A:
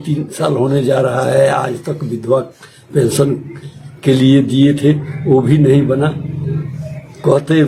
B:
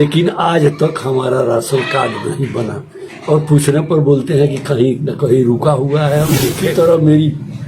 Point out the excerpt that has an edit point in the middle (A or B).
B